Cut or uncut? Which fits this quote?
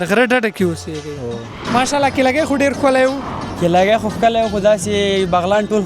cut